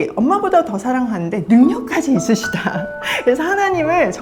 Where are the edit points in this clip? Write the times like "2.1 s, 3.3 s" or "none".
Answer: none